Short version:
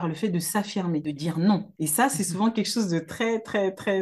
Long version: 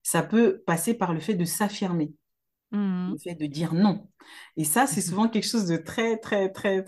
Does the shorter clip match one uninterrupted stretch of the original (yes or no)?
no